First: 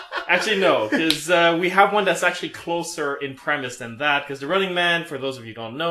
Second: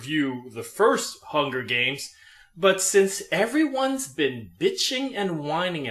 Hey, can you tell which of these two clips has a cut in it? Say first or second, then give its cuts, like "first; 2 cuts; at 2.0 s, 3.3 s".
first; 1 cut; at 2.7 s